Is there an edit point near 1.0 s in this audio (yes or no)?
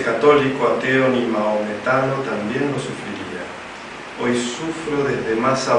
no